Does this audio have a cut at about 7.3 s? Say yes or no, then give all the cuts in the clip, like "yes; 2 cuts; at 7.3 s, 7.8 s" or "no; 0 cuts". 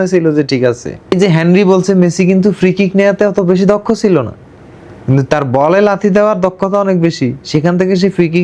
no; 1 cut; at 1.1 s